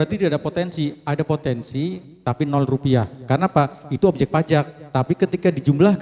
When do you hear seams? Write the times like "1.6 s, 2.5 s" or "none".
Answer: none